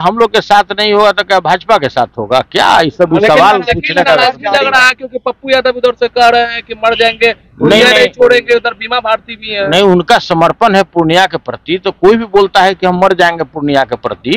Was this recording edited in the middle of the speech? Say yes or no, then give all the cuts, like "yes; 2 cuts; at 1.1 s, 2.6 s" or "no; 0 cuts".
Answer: no; 0 cuts